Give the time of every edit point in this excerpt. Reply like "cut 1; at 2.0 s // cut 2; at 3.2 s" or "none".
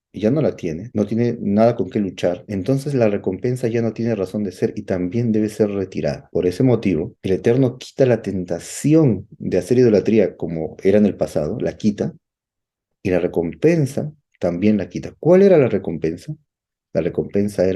cut 1; at 0.8 s // cut 2; at 2.4 s // cut 3; at 6.2 s // cut 4; at 7.1 s